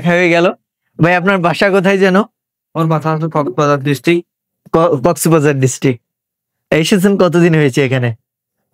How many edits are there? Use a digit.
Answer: 0